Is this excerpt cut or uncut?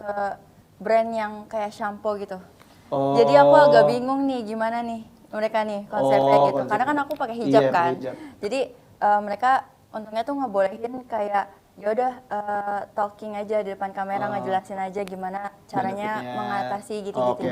uncut